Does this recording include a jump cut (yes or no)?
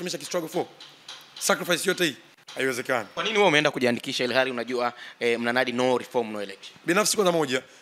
yes